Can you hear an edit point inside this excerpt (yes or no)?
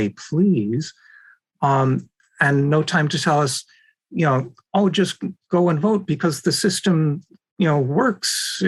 no